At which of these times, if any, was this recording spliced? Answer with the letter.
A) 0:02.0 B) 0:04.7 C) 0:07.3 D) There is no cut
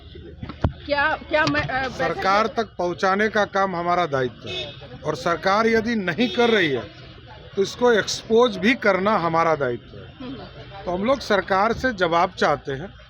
A